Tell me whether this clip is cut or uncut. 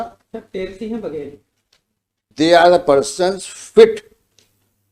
cut